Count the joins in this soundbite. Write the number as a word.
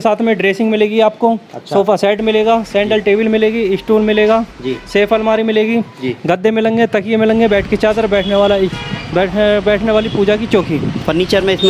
zero